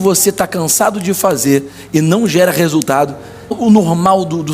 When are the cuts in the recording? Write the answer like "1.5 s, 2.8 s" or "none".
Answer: 3.6 s